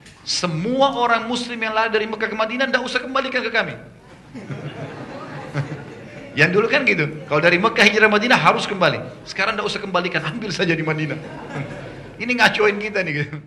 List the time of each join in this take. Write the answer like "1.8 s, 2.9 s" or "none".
none